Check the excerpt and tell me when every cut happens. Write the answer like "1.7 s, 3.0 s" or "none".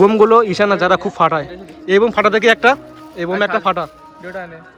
none